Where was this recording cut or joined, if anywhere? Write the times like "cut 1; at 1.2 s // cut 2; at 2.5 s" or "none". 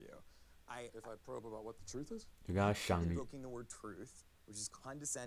none